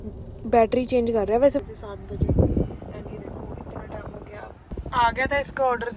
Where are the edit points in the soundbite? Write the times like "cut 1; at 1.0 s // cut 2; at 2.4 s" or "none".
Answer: cut 1; at 1.6 s // cut 2; at 4.7 s

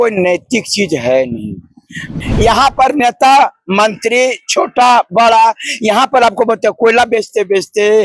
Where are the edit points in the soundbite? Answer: cut 1; at 2.1 s

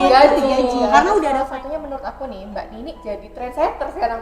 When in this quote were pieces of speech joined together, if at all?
cut 1; at 1.4 s

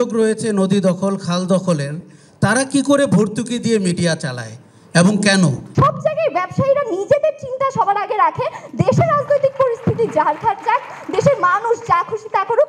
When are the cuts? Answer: cut 1; at 5.6 s

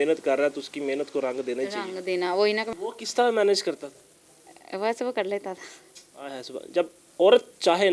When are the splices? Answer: cut 1; at 2.7 s

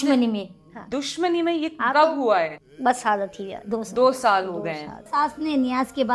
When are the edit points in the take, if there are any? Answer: cut 1; at 2.6 s // cut 2; at 5.1 s

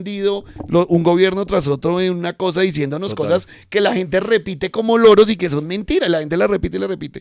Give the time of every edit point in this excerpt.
none

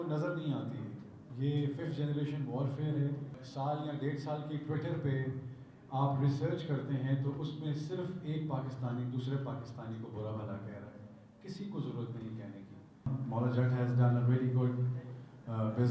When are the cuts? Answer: cut 1; at 3.4 s // cut 2; at 13.1 s

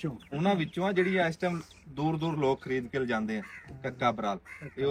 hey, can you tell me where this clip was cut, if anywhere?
none

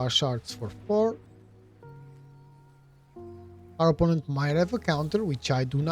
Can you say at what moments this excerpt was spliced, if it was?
cut 1; at 1.8 s // cut 2; at 3.4 s

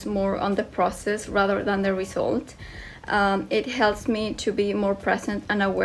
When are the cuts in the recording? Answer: none

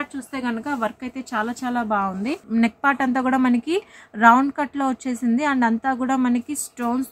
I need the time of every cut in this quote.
cut 1; at 2.4 s

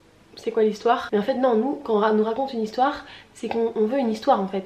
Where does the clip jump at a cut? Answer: cut 1; at 1.0 s

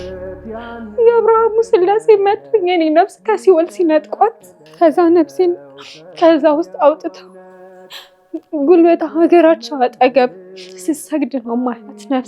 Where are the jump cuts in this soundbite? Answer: cut 1; at 0.9 s

